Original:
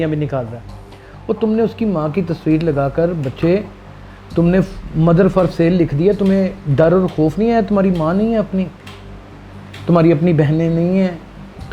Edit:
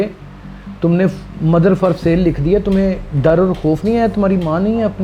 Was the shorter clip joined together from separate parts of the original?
no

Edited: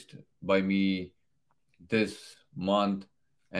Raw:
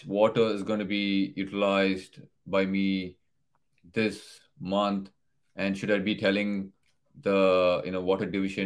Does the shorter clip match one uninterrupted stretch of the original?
yes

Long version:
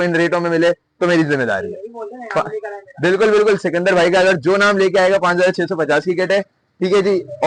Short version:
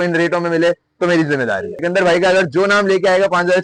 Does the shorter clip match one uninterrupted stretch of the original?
no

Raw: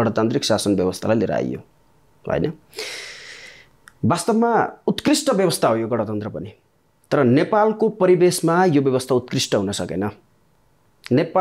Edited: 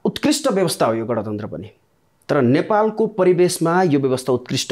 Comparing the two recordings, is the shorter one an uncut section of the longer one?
yes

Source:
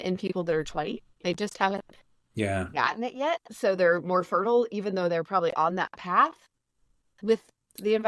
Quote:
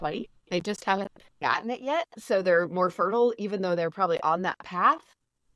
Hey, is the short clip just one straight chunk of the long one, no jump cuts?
no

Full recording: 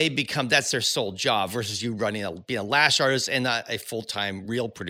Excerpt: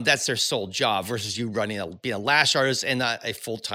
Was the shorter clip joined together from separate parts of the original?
no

